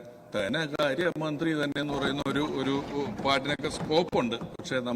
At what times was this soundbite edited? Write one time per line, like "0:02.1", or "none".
none